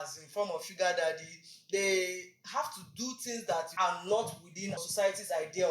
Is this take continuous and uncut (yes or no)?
no